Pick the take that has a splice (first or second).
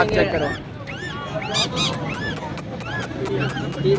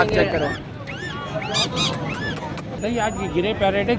second